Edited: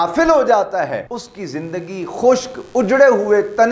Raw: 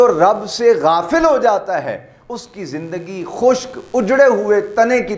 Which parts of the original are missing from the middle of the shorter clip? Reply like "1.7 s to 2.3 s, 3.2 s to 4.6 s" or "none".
2.1 s to 2.4 s